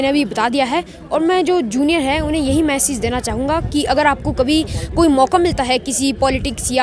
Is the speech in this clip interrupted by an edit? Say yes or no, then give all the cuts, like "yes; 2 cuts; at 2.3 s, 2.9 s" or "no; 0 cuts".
no; 0 cuts